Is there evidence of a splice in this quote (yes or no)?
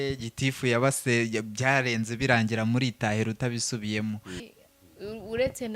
yes